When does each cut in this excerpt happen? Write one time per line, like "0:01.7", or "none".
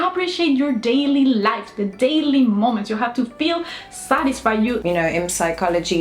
0:04.9